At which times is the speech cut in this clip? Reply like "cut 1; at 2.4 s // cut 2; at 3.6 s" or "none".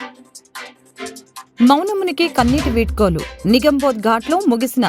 cut 1; at 1.5 s